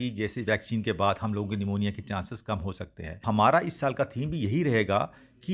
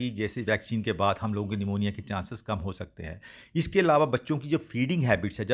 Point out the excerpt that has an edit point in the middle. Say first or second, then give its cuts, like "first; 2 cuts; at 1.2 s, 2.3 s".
first; 1 cut; at 3.2 s